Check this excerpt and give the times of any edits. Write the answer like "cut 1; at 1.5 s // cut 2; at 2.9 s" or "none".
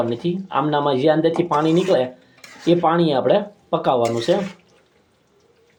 none